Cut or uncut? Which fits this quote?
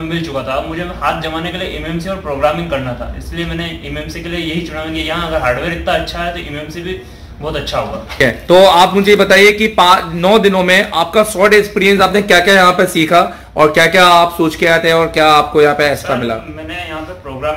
uncut